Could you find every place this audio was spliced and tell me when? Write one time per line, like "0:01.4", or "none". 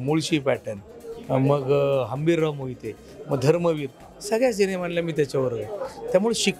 none

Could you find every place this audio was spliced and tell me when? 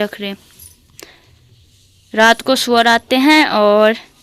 none

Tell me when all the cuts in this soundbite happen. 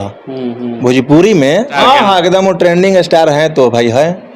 0:01.7

